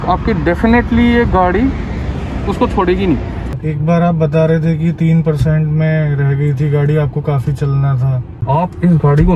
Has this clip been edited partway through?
yes; 2 cuts; at 3.5 s, 8.4 s

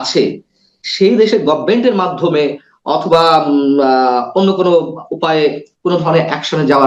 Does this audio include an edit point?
no; 0 cuts

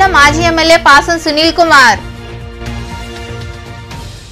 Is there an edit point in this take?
no; 0 cuts

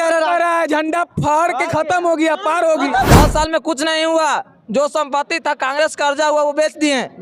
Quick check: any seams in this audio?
yes; 1 cut; at 3.1 s

